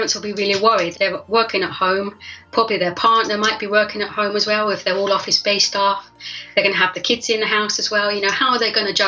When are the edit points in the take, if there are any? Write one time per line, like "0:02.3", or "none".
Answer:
0:00.9
0:02.4